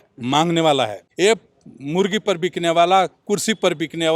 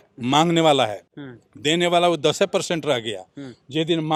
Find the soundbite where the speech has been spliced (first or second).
first